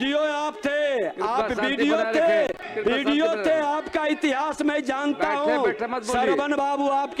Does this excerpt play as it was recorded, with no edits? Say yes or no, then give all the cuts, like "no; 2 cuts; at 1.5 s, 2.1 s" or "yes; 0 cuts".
no; 1 cut; at 2.6 s